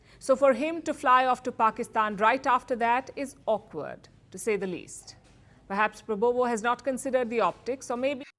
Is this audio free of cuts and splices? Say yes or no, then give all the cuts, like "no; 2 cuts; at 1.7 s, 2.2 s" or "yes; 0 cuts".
yes; 0 cuts